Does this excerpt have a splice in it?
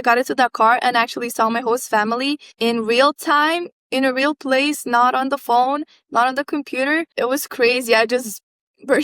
yes; 1 cut; at 7.1 s

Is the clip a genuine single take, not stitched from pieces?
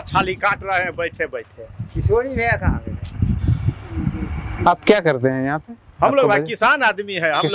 yes; 0 cuts

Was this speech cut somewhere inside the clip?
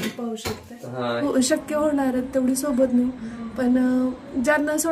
yes; 1 cut; at 1.2 s

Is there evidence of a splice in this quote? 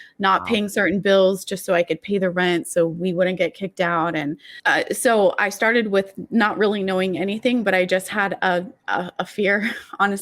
yes; 1 cut; at 4.5 s

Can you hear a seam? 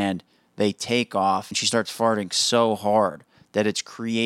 yes; 1 cut; at 1.5 s

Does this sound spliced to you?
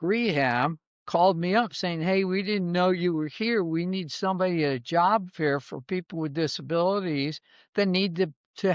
no; 0 cuts

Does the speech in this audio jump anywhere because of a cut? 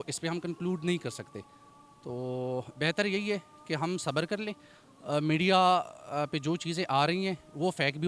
no; 0 cuts

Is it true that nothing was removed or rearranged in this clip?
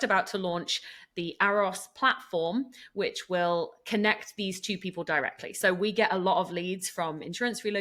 yes; 0 cuts

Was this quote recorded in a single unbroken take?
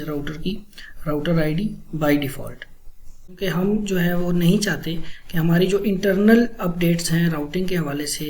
no; 1 cut; at 3.3 s

